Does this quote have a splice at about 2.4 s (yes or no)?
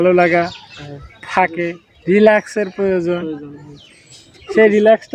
no